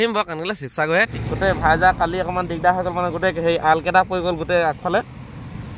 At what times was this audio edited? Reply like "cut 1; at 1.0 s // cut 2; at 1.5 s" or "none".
cut 1; at 1.1 s